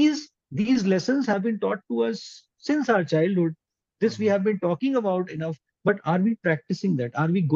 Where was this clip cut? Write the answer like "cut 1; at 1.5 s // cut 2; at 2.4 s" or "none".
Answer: none